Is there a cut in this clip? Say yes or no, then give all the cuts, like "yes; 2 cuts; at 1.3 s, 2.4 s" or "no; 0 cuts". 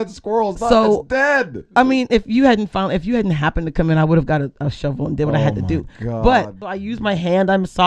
yes; 1 cut; at 6.9 s